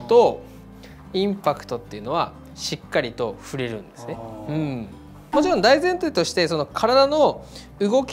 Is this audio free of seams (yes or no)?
no